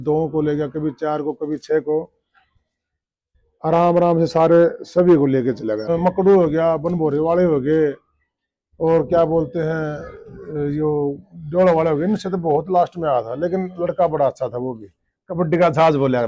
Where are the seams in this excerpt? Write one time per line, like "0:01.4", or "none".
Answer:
0:05.8